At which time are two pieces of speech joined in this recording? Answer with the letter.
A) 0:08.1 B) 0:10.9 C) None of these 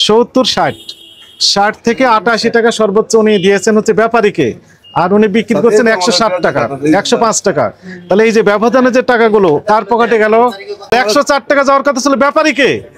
B